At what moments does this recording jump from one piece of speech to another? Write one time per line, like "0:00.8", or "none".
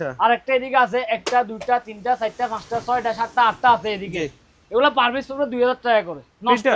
none